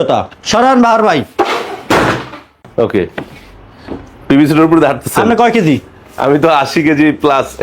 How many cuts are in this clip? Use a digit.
1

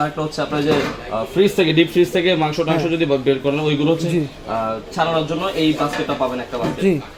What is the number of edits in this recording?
0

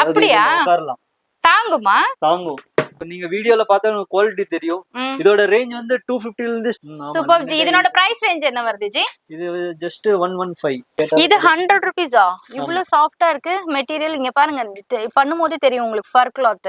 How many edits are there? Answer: 3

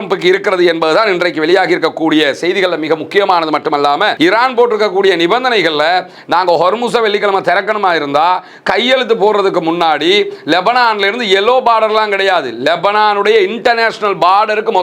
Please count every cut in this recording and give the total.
1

